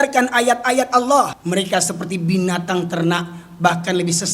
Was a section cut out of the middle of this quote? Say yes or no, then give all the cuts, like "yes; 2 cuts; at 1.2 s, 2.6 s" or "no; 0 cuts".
yes; 1 cut; at 1.4 s